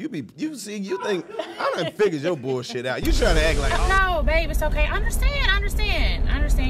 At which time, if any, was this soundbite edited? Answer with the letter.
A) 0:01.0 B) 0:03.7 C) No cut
B